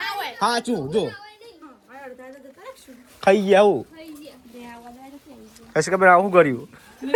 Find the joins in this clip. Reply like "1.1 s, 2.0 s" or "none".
none